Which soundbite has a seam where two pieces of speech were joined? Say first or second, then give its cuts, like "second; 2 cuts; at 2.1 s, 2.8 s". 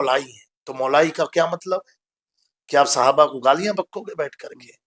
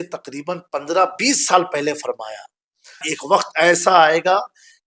second; 1 cut; at 3.1 s